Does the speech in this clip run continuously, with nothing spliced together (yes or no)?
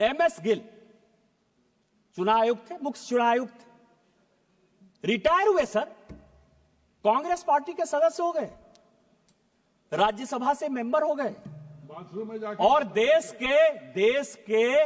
yes